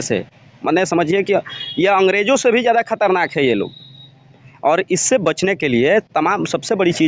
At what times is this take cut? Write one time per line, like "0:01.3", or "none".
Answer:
none